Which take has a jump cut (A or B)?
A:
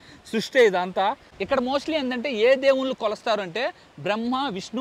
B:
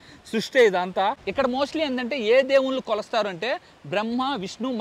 B